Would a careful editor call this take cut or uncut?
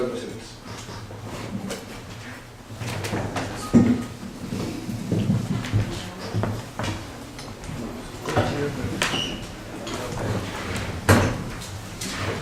uncut